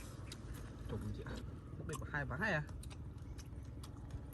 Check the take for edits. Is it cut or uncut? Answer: cut